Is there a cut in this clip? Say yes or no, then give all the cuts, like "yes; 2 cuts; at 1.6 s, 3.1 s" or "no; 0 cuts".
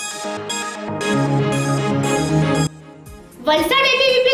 yes; 1 cut; at 2.6 s